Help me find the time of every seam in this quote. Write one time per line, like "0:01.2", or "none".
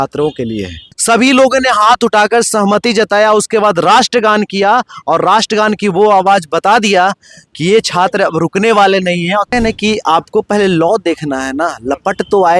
0:00.9
0:09.5